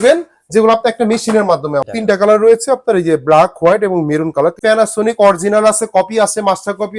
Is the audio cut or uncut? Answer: cut